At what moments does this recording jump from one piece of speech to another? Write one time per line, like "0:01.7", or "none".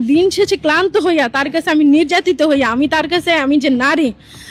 none